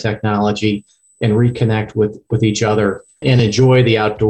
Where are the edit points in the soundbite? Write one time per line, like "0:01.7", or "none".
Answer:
0:03.1